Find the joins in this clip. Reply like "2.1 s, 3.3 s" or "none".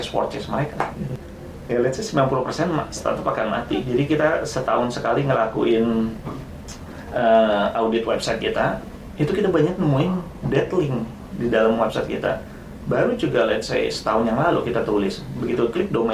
1.1 s